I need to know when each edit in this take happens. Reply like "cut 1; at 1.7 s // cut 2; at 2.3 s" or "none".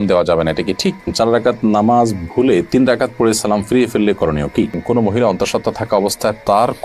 cut 1; at 1.1 s // cut 2; at 4.8 s